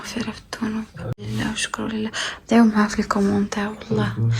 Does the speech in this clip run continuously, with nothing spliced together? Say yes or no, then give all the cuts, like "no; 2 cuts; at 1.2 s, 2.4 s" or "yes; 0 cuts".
no; 1 cut; at 1.3 s